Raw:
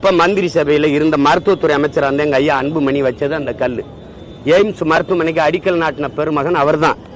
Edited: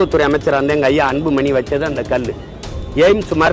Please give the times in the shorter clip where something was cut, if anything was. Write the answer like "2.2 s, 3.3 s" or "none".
none

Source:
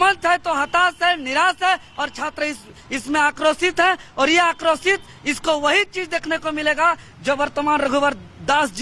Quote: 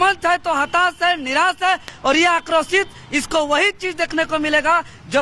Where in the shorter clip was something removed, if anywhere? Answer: 1.9 s

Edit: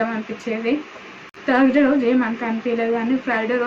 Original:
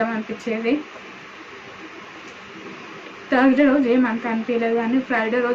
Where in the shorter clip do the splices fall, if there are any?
1.6 s

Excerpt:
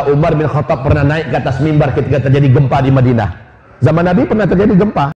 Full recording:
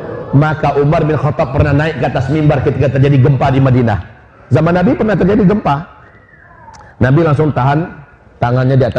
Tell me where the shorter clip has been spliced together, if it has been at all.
none

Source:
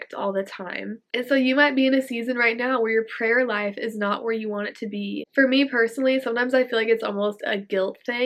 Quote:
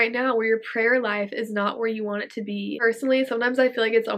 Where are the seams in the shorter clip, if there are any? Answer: 2.8 s

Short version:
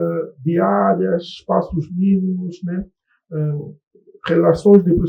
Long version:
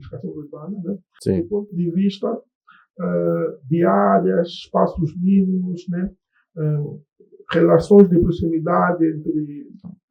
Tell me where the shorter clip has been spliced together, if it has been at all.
none

